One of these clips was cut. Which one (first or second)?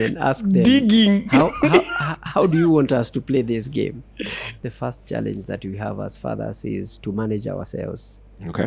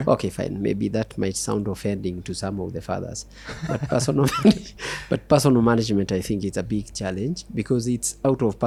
first